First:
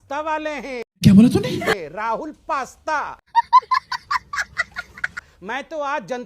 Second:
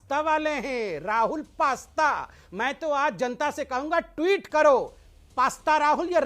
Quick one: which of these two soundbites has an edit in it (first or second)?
second